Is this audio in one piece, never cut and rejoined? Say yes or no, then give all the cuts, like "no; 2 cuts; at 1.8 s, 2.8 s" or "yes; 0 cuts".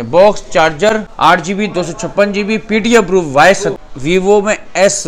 no; 2 cuts; at 1.1 s, 3.7 s